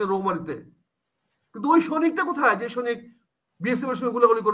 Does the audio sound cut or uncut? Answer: uncut